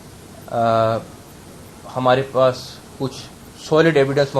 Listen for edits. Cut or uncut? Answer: uncut